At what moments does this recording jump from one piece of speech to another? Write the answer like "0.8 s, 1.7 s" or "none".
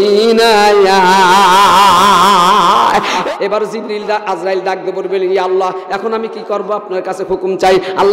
3.2 s